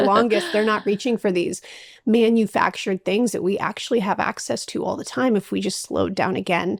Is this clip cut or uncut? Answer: uncut